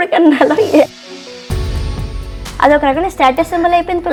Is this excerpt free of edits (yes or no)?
yes